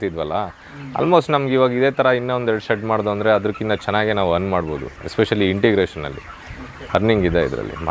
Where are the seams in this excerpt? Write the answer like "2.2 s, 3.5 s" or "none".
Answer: none